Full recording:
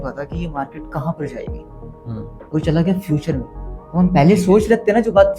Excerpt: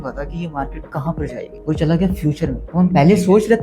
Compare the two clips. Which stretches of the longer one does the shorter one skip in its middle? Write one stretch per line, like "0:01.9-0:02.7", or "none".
0:01.5-0:02.4
0:03.5-0:03.8